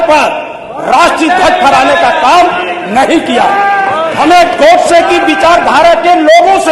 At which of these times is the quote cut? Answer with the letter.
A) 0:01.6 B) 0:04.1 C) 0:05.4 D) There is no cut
B